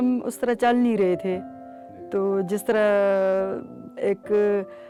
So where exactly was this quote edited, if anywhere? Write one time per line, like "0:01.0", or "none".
none